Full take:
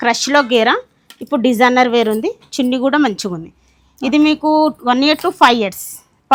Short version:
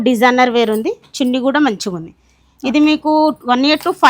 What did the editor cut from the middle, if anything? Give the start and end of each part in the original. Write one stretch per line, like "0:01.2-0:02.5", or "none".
none